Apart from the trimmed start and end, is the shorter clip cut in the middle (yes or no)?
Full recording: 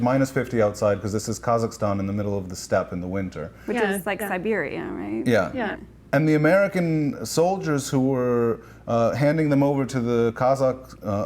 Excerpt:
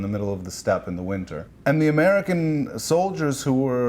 yes